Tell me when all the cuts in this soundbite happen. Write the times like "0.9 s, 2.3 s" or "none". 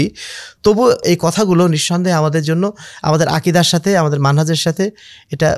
1.0 s